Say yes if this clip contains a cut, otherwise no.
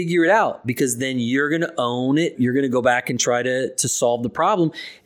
yes